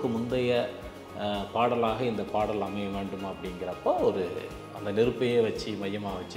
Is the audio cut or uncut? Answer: uncut